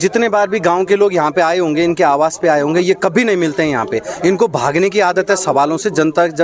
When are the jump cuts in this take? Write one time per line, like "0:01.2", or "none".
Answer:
none